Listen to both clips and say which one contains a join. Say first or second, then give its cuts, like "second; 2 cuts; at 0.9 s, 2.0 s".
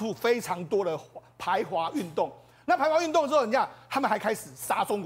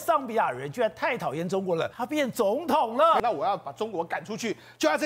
second; 2 cuts; at 1.9 s, 3.2 s